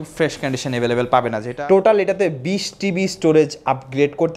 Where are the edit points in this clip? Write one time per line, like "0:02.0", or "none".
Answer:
0:01.5